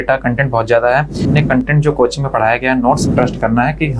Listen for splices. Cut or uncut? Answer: cut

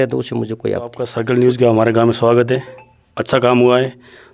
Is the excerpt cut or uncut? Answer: cut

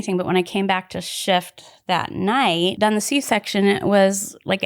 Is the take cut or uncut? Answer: cut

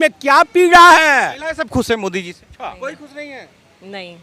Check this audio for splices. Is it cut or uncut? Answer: cut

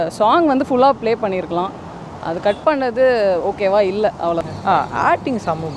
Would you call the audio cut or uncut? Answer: cut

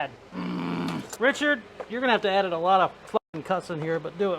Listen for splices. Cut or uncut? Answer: cut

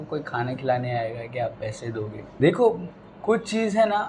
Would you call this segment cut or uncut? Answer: cut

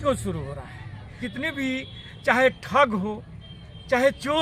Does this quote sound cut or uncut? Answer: cut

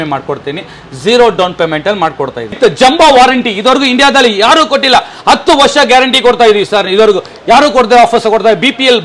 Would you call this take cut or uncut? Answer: cut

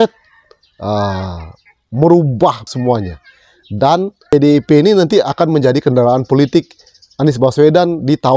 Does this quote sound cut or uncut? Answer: cut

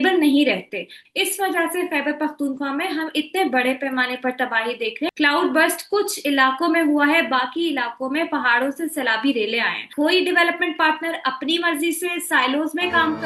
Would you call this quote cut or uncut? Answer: cut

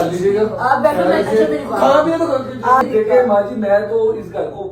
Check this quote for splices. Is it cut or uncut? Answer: cut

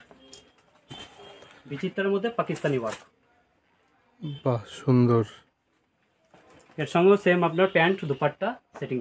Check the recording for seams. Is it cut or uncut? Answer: uncut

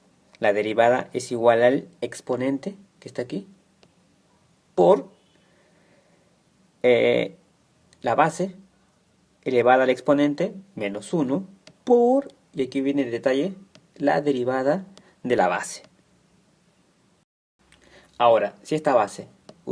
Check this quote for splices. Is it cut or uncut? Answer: cut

